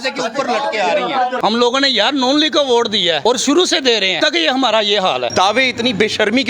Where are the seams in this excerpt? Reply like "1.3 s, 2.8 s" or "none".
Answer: 1.4 s, 3.2 s, 4.2 s, 5.3 s

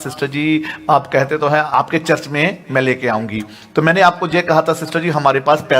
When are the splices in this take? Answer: 1.7 s

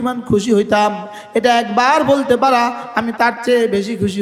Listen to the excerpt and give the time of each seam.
none

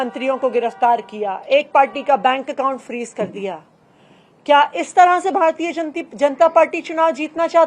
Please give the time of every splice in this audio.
none

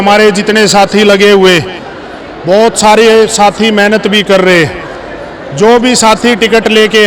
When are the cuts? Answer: none

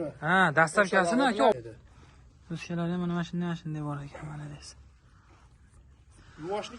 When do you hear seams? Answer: 1.5 s

